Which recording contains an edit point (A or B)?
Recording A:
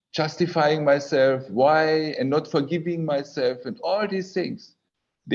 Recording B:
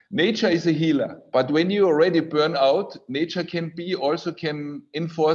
B